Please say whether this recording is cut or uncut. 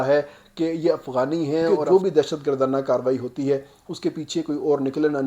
cut